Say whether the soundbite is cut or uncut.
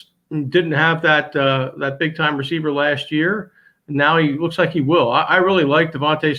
uncut